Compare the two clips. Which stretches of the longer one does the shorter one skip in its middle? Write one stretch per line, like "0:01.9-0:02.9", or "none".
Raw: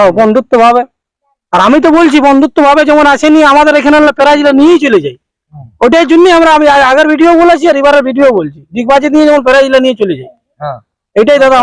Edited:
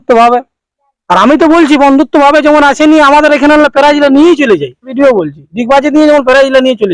0:05.3-0:08.1